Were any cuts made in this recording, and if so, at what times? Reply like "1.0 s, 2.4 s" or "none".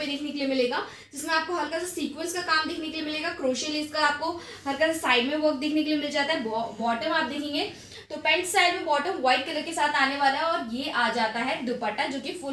none